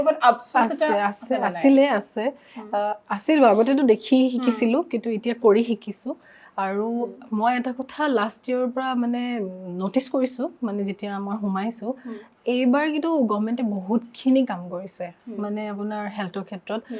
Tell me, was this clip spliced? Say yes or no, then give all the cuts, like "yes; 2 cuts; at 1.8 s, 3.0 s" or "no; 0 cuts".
no; 0 cuts